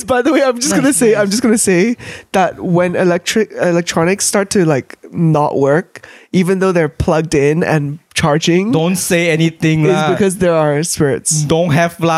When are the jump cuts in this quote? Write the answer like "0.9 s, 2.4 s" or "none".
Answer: none